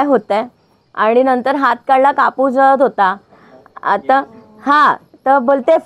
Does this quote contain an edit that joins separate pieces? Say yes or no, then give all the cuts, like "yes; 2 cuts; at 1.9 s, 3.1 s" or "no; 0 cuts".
no; 0 cuts